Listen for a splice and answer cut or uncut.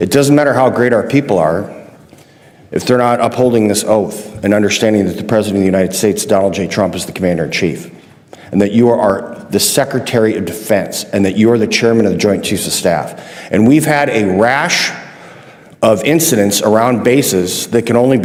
uncut